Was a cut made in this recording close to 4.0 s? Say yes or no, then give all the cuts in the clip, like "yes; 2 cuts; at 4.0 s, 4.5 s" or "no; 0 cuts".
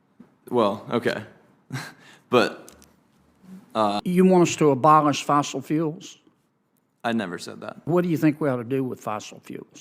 yes; 2 cuts; at 4.0 s, 7.8 s